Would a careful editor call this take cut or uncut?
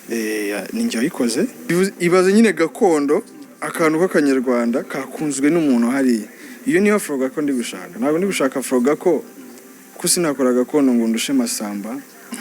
cut